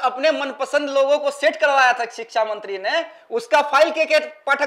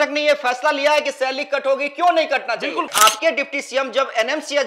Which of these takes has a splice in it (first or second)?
second